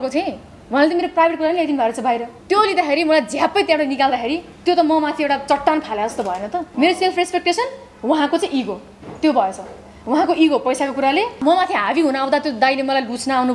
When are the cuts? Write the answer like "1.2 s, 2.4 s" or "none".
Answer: 2.3 s, 6.7 s, 11.3 s